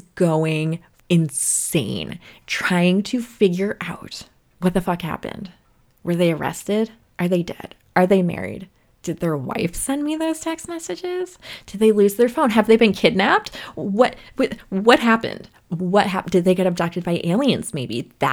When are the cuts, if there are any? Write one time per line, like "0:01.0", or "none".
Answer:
0:00.9